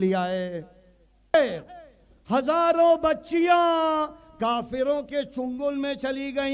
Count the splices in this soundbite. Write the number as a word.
one